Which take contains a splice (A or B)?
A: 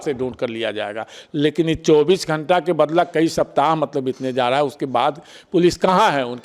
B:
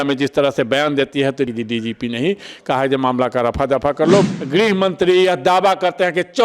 B